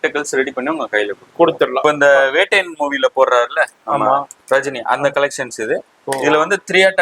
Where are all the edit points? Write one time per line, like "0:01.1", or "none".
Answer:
0:01.8
0:04.3